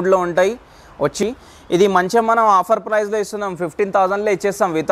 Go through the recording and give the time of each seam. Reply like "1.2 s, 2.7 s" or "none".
1.2 s

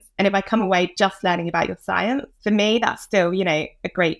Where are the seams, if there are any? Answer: 2.3 s

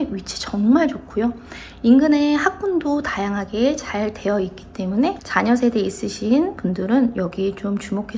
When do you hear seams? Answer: 5.2 s, 6.6 s

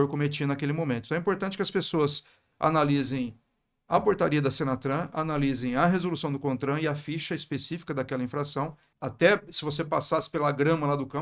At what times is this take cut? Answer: 8.8 s

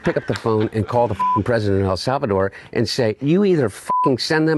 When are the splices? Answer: 3.2 s

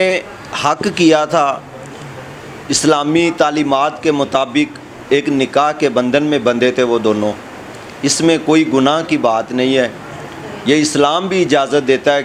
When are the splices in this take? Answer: none

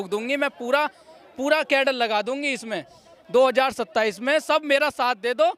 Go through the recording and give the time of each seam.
none

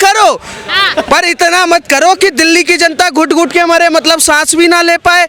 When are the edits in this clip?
none

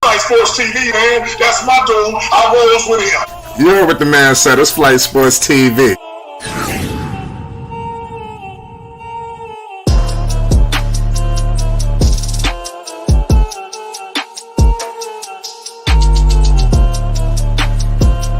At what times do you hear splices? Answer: 0.9 s

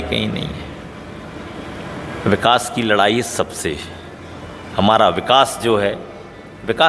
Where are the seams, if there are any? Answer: none

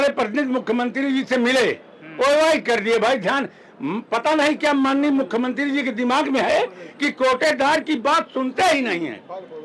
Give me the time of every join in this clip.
none

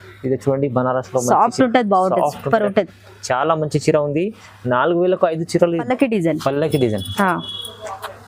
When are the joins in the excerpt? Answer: 5.8 s

